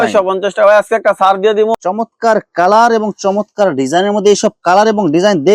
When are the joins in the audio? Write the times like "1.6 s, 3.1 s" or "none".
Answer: 1.7 s

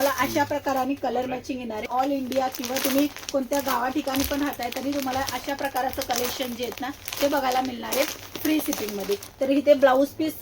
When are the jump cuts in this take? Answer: 1.9 s, 9.3 s

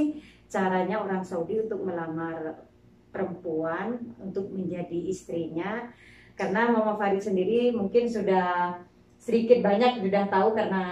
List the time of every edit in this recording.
none

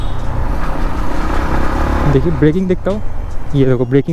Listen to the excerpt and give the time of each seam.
none

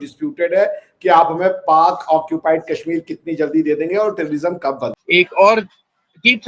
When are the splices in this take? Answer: 4.9 s

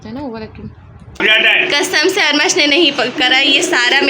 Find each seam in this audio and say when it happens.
1.2 s

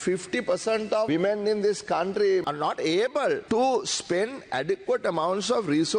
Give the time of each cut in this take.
1.1 s, 2.4 s, 3.4 s

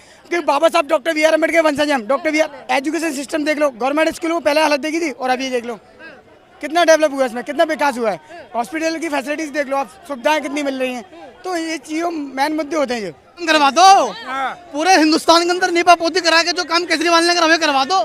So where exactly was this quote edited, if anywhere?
2.5 s, 13.5 s

